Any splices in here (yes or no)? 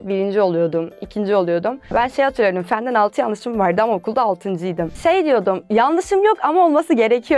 yes